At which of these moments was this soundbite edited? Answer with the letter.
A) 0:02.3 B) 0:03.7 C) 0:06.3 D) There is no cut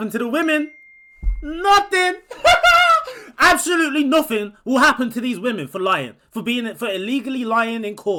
D